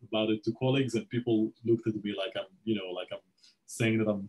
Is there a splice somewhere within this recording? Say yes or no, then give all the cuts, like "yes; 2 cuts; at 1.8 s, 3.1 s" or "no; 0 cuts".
no; 0 cuts